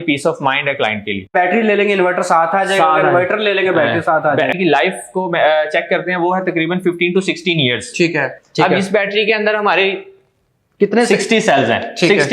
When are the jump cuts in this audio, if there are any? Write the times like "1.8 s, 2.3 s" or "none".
1.3 s, 4.5 s, 8.4 s